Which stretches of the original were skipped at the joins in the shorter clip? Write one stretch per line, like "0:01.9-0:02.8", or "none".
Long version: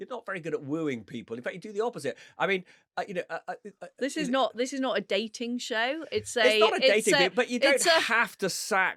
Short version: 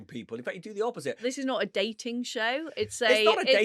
0:02.2-0:04.5